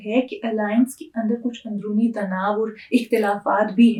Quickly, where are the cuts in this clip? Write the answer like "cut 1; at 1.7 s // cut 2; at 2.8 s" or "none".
none